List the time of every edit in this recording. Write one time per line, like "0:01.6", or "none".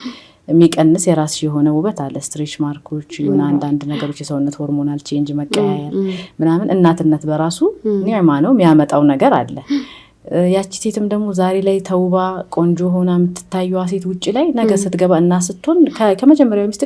none